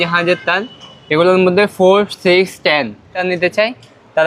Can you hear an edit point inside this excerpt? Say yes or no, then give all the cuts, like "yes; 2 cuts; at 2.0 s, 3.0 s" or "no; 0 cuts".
yes; 1 cut; at 3.2 s